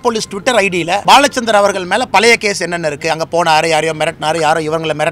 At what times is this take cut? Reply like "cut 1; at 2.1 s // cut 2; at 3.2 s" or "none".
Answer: cut 1; at 1.0 s